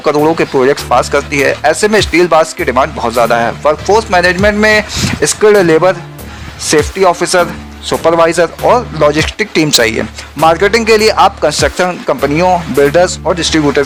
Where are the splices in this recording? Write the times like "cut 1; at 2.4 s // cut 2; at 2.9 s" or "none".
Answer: none